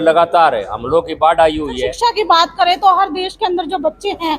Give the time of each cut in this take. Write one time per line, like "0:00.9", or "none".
0:01.9